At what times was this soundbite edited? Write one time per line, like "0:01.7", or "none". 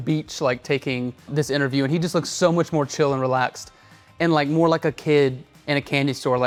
none